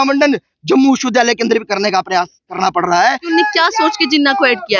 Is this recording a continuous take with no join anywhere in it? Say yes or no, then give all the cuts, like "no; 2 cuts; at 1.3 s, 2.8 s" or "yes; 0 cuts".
no; 1 cut; at 3.2 s